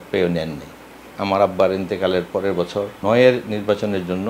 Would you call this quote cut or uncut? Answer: cut